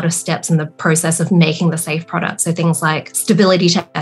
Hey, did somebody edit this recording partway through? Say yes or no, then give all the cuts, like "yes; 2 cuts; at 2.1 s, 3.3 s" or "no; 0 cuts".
yes; 1 cut; at 3.1 s